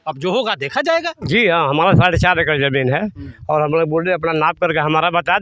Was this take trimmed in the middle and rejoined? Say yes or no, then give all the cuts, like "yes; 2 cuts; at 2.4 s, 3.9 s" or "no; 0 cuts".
yes; 1 cut; at 1.2 s